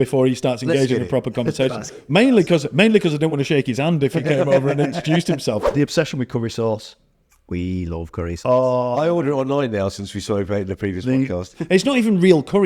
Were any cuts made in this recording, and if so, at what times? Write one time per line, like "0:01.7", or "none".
0:05.6
0:11.6